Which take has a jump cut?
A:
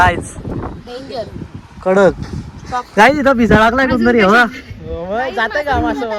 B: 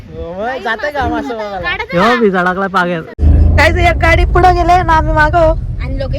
B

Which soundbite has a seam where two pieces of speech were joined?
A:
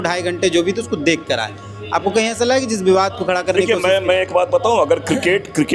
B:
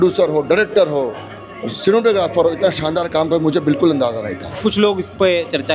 B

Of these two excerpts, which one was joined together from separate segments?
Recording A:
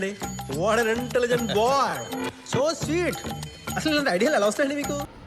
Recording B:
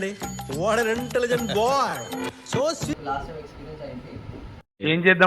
B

